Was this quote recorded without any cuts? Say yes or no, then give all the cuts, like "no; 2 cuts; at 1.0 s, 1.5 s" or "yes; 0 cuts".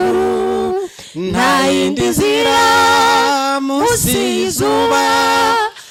yes; 0 cuts